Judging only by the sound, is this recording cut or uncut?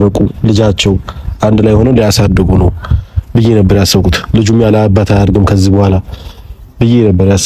uncut